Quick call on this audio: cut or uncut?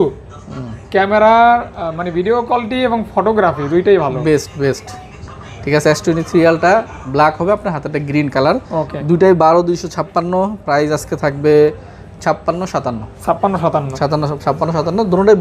uncut